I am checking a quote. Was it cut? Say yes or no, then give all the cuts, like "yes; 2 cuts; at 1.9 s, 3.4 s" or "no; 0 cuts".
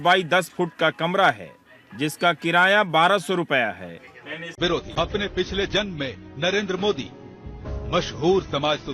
yes; 1 cut; at 4.4 s